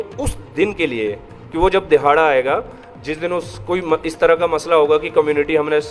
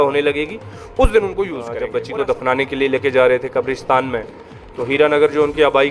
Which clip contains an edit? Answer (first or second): second